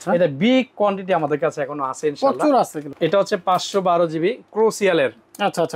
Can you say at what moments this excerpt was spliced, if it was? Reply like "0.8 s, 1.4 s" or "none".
2.8 s